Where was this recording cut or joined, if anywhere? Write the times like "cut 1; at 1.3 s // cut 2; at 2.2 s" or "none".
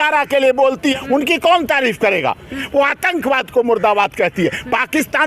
cut 1; at 1.0 s